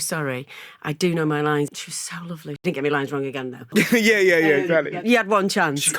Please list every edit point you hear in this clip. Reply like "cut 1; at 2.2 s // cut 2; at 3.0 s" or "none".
cut 1; at 2.2 s // cut 2; at 3.7 s // cut 3; at 5.0 s